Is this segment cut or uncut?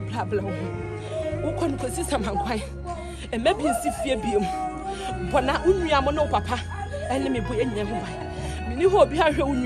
uncut